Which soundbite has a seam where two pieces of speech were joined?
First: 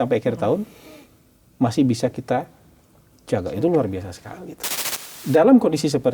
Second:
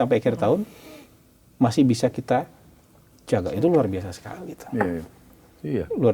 first; 1 cut; at 4.6 s

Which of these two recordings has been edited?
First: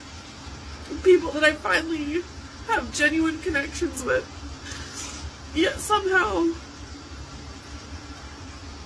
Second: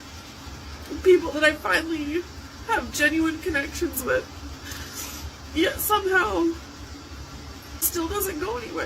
second; 1 cut; at 7.9 s

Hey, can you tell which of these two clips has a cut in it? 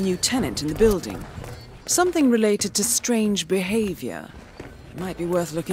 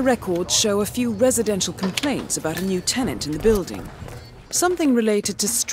second; 1 cut; at 1.1 s

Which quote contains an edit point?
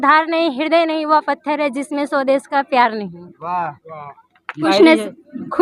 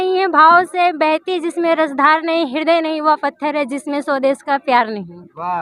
first; 1 cut; at 4.7 s

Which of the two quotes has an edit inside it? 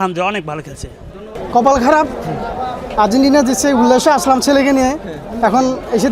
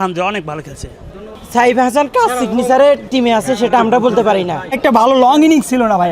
second; 2 cuts; at 1.2 s, 4.6 s

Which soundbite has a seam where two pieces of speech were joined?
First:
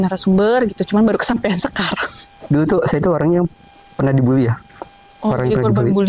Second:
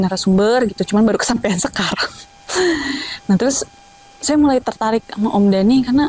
first; 1 cut; at 2.4 s

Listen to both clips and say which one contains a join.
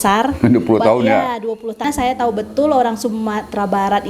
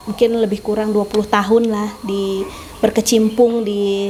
first; 1 cut; at 1.8 s

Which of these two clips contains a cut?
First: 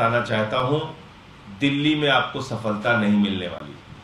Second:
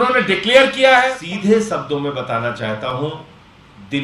second; 1 cut; at 1.2 s

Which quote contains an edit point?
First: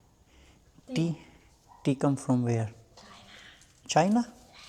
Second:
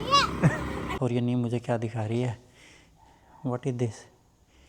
second; 1 cut; at 0.9 s

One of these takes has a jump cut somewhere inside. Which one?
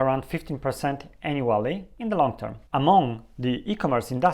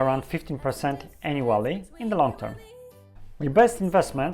second; 1 cut; at 2.6 s

